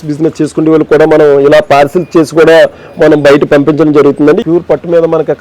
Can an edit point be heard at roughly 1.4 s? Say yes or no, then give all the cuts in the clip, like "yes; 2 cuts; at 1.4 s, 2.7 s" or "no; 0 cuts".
no; 1 cut; at 4.4 s